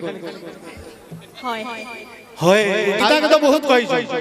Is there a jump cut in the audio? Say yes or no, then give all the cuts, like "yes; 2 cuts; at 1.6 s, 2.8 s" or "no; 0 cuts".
yes; 1 cut; at 3.0 s